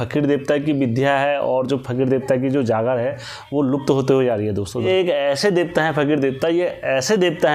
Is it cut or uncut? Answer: cut